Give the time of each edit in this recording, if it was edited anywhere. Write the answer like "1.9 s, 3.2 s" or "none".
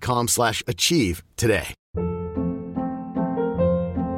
1.8 s